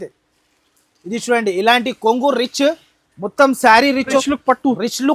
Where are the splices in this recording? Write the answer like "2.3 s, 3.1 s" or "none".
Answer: 4.2 s